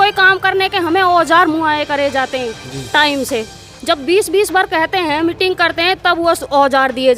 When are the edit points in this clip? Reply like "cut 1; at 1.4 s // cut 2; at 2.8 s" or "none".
none